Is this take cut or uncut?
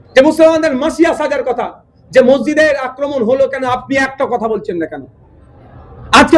uncut